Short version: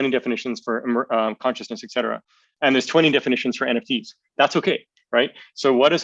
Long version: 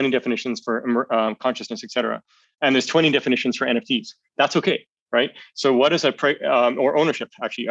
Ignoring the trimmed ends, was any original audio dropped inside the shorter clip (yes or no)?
no